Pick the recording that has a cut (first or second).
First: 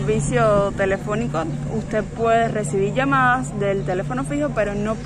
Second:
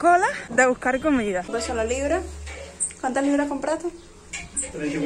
second